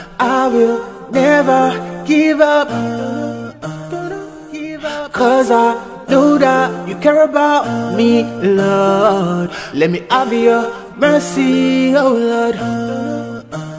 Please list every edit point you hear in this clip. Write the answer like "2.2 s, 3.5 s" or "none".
12.7 s